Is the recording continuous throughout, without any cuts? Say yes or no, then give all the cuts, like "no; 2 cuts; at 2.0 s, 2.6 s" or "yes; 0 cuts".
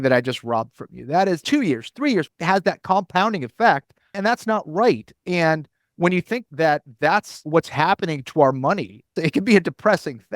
no; 6 cuts; at 1.4 s, 2.3 s, 4.2 s, 6.5 s, 7.4 s, 9.2 s